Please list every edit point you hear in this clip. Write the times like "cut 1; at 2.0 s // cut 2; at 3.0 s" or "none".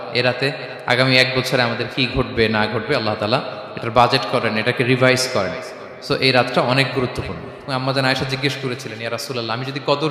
cut 1; at 7.5 s